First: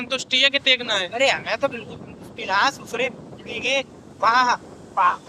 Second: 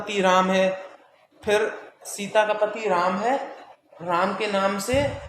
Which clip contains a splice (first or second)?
first